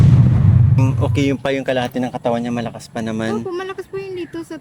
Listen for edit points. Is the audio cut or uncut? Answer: cut